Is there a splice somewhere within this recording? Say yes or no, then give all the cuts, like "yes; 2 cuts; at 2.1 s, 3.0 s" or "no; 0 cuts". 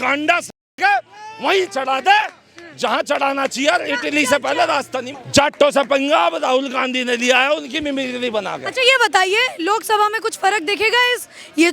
no; 0 cuts